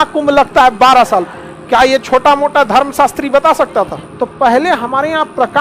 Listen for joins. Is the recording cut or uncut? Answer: cut